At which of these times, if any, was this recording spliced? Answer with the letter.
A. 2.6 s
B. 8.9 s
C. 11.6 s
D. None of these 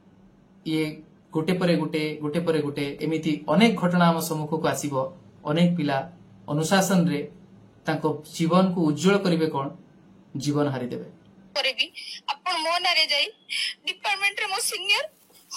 C